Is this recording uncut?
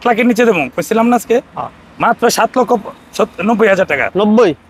yes; 0 cuts

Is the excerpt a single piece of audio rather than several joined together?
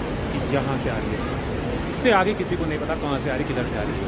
yes; 0 cuts

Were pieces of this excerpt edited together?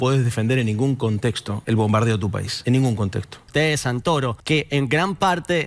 yes; 4 cuts; at 1.5 s, 2.5 s, 3.5 s, 4.4 s

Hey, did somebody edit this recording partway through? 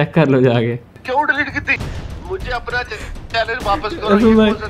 yes; 1 cut; at 0.9 s

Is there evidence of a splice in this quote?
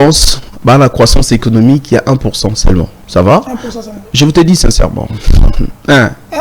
yes; 1 cut; at 3.0 s

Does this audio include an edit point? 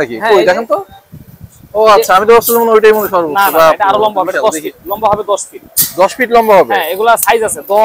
no; 0 cuts

